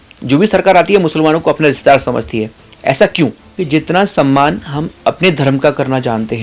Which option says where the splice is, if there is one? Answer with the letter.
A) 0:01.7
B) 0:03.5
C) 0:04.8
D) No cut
B